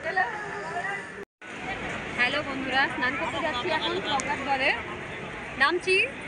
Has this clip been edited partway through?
yes; 1 cut; at 1.4 s

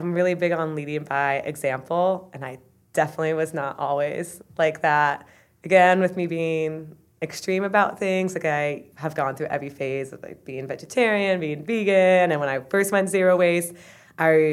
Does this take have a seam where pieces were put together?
yes; 2 cuts; at 4.4 s, 8.9 s

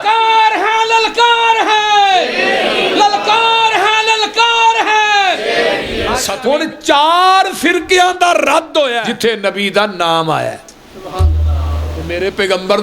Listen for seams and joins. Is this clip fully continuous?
no; 3 cuts; at 6.3 s, 9.1 s, 12.1 s

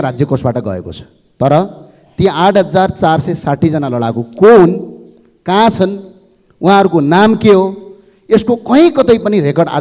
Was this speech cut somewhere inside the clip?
no; 0 cuts

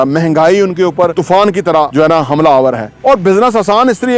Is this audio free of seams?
no; 3 cuts; at 1.1 s, 1.9 s, 2.9 s

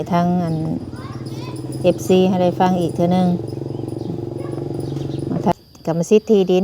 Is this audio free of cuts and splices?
no; 1 cut; at 5.5 s

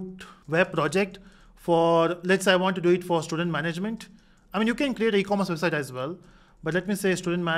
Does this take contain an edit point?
no; 0 cuts

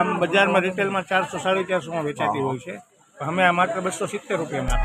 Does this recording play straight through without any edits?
yes; 0 cuts

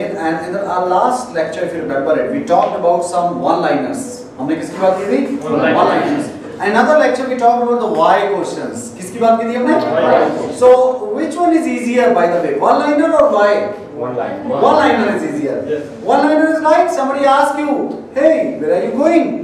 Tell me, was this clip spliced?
no; 0 cuts

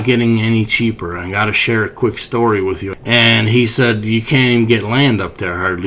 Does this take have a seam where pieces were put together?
yes; 1 cut; at 2.9 s

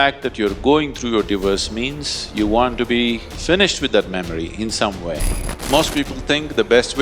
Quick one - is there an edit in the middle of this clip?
yes; 2 cuts; at 3.3 s, 5.5 s

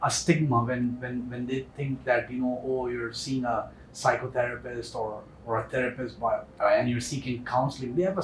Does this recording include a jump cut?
no; 0 cuts

